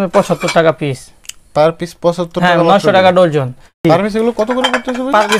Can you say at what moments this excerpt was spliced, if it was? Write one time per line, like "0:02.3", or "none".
0:03.8

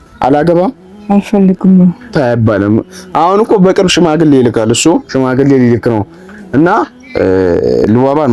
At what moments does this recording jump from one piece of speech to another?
none

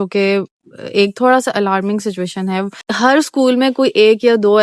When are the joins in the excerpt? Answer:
0:02.8

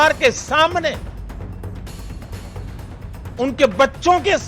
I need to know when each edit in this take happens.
none

